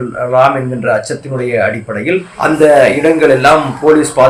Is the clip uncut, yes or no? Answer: yes